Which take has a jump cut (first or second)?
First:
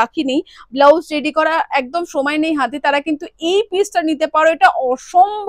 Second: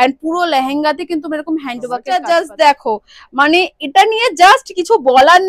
second